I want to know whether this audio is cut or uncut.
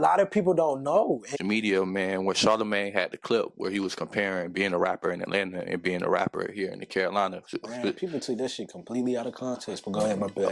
cut